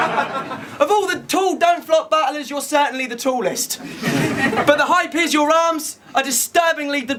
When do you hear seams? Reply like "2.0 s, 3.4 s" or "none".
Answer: none